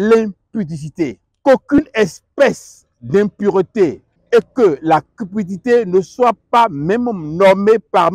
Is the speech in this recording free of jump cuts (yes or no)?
no